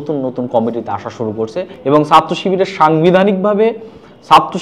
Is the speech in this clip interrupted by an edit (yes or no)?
yes